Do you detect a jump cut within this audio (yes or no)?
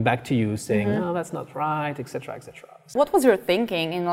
yes